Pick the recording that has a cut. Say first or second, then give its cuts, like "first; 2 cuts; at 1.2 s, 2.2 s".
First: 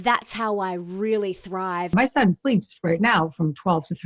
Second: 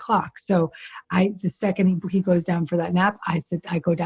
first; 1 cut; at 1.9 s